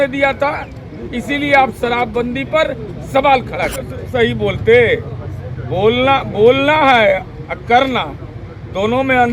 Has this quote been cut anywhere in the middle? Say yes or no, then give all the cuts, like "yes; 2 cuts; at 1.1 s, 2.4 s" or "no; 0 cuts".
yes; 1 cut; at 4.0 s